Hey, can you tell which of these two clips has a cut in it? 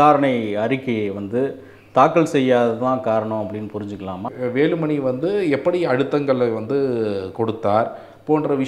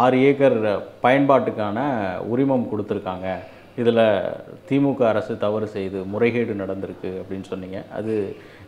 first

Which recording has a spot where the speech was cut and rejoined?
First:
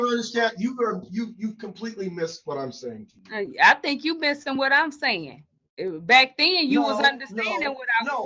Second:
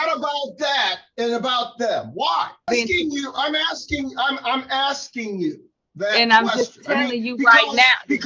second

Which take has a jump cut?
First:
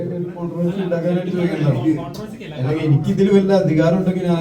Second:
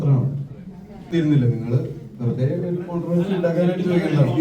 second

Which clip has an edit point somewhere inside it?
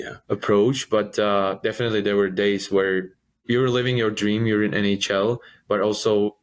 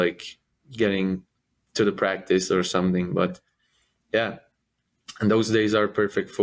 first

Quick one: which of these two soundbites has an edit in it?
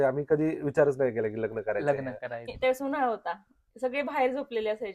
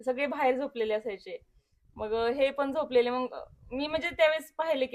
first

